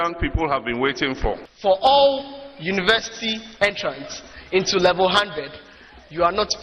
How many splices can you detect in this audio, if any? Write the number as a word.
one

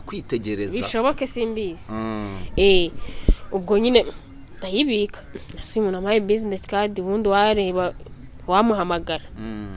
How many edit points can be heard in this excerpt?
one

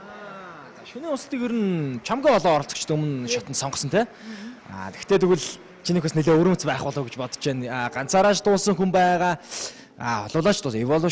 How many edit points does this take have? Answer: one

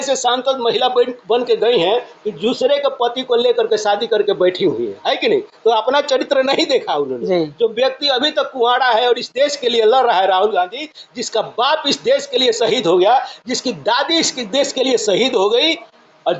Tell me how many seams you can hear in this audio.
zero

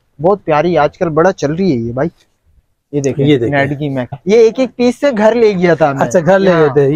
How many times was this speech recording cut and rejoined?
one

